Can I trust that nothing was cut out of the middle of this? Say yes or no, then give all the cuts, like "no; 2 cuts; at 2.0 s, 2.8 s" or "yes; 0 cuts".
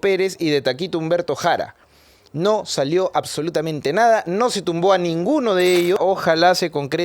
no; 1 cut; at 6.0 s